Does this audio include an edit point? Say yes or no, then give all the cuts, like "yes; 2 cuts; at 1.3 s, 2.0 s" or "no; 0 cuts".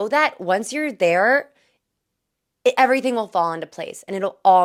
no; 0 cuts